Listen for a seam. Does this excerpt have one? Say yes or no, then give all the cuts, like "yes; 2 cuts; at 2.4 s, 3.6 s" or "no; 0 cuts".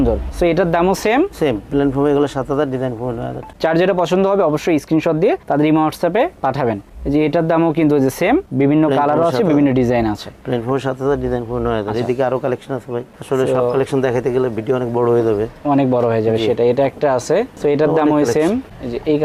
no; 0 cuts